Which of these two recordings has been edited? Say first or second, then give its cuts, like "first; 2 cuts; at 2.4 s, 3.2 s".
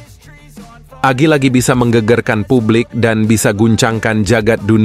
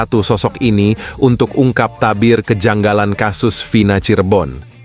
first; 1 cut; at 1.0 s